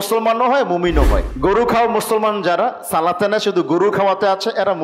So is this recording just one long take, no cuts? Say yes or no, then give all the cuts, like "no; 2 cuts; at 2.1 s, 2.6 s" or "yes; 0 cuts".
no; 1 cut; at 1.3 s